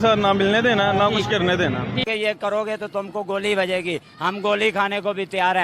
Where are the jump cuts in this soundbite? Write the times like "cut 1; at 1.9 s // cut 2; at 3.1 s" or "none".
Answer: cut 1; at 2.0 s

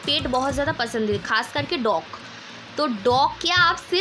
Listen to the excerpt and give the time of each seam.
none

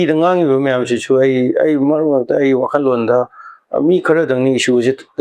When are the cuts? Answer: none

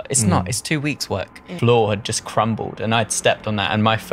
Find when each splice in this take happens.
cut 1; at 1.5 s

